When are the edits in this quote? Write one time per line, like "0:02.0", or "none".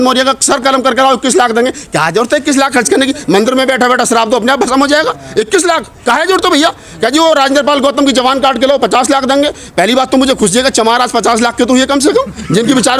none